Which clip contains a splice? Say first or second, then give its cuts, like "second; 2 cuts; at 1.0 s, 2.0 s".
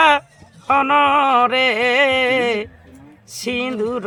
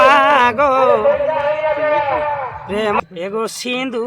second; 1 cut; at 3.0 s